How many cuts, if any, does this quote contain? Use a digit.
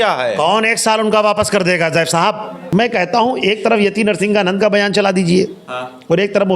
1